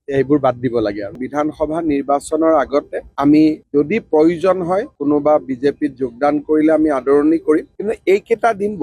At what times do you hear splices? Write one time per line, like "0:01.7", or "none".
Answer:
0:01.1